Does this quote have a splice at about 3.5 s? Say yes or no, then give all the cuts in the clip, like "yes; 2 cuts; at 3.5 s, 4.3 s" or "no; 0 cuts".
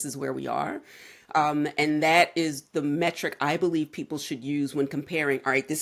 no; 0 cuts